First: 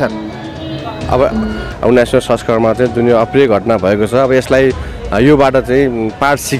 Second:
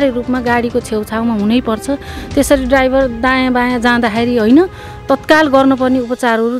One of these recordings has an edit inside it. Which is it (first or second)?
first